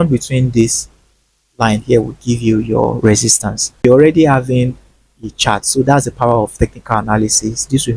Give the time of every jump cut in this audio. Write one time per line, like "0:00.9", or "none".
0:03.8